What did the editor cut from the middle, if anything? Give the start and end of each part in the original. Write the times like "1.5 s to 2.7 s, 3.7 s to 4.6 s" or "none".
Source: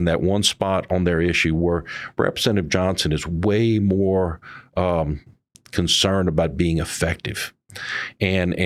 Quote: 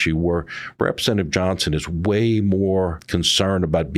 4.4 s to 5.6 s